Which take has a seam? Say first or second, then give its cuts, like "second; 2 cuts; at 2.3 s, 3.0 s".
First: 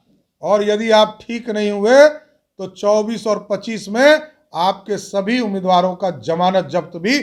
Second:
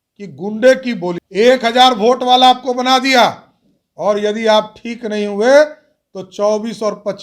second; 1 cut; at 1.2 s